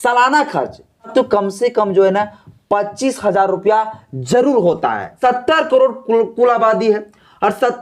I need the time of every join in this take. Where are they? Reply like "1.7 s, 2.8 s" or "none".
1.1 s, 5.1 s